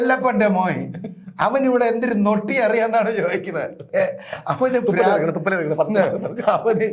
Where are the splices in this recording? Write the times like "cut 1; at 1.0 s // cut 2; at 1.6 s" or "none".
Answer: none

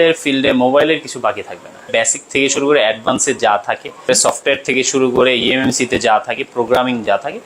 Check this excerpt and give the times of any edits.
cut 1; at 1.9 s // cut 2; at 4.1 s

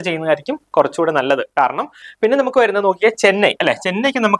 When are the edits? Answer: cut 1; at 2.0 s

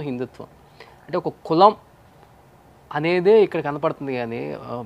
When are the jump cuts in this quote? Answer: none

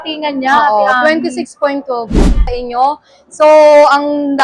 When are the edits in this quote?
cut 1; at 2.4 s

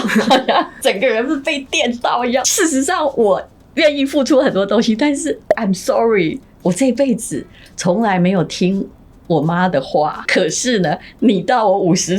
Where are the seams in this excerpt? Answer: cut 1; at 2.4 s

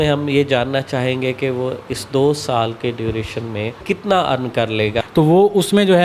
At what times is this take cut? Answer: cut 1; at 3.8 s // cut 2; at 5.0 s

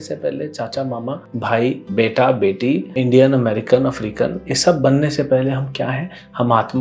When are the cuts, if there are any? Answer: cut 1; at 1.6 s // cut 2; at 2.9 s

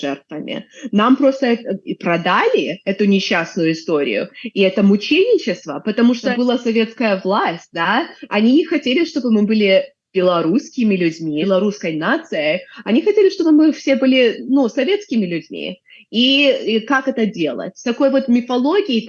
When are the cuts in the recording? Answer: cut 1; at 6.3 s // cut 2; at 11.4 s

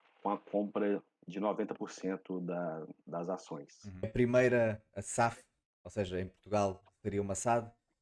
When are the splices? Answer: cut 1; at 4.1 s

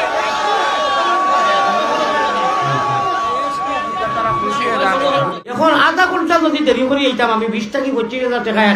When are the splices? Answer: cut 1; at 5.4 s

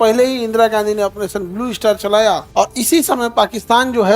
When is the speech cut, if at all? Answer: cut 1; at 2.4 s

